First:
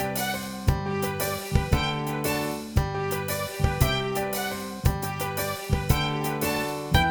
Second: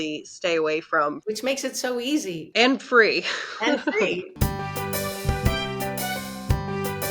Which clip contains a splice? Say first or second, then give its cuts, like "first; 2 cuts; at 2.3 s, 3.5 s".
second; 2 cuts; at 1.2 s, 4.3 s